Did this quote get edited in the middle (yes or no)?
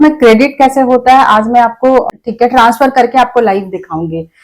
yes